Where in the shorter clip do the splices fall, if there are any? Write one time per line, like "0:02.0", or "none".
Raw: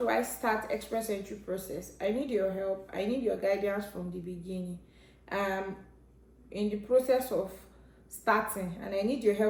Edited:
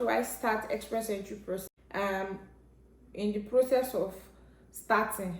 0:01.7